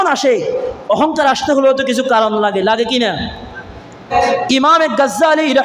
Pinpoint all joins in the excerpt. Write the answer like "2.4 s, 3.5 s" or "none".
4.1 s